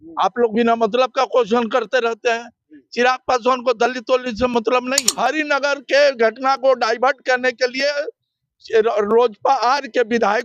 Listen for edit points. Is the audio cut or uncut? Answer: cut